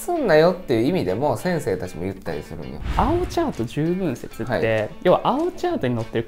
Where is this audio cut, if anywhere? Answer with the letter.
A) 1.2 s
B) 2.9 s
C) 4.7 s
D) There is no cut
B